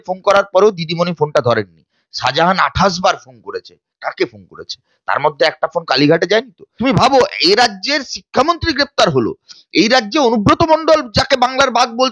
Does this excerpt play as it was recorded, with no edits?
no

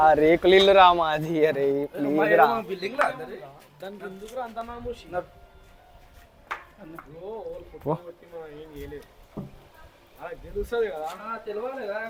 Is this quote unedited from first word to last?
yes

